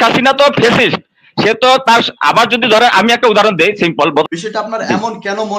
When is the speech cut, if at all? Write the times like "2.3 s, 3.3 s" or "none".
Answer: 4.2 s